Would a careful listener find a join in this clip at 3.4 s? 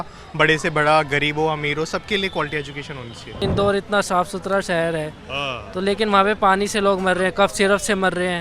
yes; 1 cut; at 3.4 s

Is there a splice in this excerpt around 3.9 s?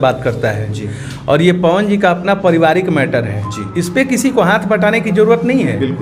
no; 0 cuts

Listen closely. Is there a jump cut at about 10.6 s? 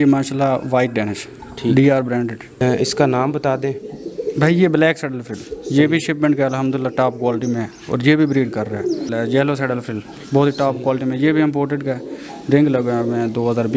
no; 2 cuts; at 2.5 s, 9.1 s

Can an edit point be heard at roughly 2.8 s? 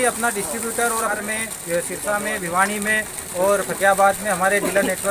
no; 1 cut; at 1.2 s

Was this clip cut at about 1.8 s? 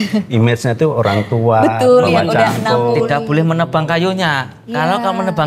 no; 1 cut; at 3.0 s

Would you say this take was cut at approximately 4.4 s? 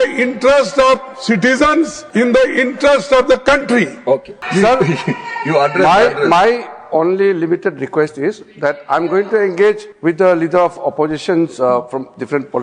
yes; 3 cuts; at 2.0 s, 4.4 s, 9.9 s

